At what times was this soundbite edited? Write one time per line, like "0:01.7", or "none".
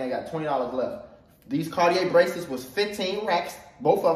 none